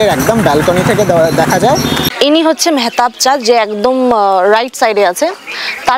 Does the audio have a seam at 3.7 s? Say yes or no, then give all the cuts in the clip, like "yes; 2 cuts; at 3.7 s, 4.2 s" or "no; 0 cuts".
no; 1 cut; at 2.1 s